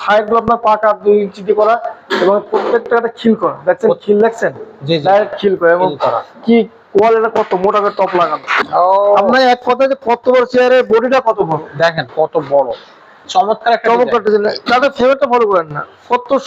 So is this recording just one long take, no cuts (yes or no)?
no